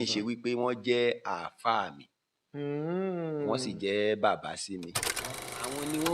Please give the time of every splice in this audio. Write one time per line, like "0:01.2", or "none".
0:05.2